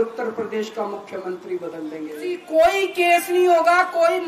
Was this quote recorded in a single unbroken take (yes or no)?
no